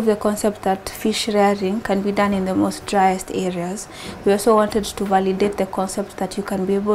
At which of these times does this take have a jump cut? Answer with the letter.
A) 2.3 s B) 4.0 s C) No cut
C